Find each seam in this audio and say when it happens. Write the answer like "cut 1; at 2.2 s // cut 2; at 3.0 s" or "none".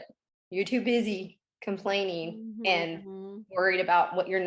none